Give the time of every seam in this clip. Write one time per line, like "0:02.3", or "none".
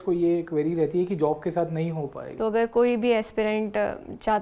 0:02.2

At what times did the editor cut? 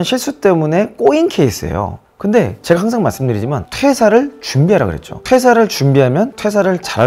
none

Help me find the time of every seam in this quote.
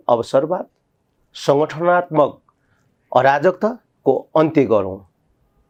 none

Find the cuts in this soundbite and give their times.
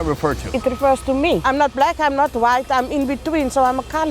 0:01.4

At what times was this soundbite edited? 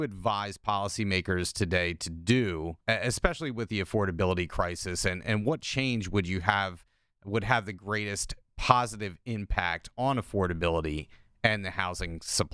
0:02.8

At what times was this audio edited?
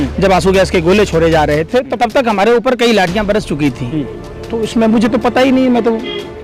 0:01.9

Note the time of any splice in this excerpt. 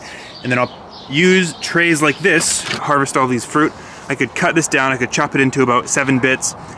0:02.8

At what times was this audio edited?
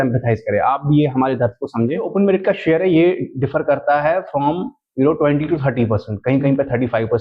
0:02.1

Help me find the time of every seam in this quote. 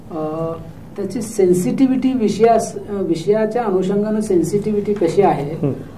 none

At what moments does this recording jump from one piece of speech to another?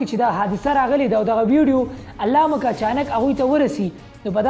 none

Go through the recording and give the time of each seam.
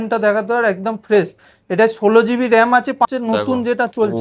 0:03.1

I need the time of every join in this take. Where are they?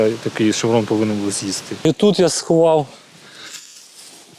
0:01.8

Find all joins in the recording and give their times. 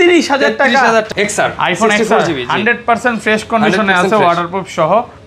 0:01.1

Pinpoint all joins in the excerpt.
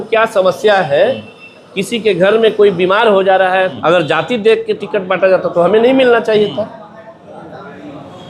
0:03.8

